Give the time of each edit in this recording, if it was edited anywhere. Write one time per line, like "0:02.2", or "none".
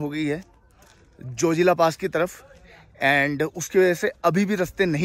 none